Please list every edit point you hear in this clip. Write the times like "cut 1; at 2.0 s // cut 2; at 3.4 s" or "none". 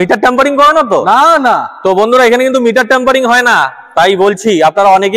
none